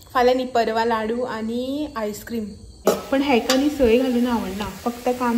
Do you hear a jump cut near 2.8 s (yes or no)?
yes